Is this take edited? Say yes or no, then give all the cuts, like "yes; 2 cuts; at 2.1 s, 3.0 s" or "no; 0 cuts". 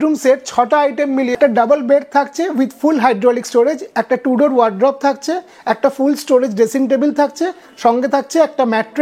yes; 1 cut; at 1.3 s